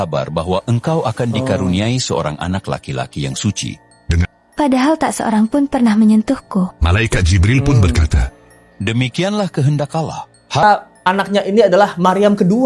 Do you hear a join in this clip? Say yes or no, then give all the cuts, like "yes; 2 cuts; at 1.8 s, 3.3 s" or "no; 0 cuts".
yes; 2 cuts; at 4.3 s, 10.6 s